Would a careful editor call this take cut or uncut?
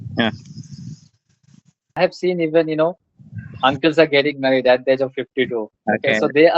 cut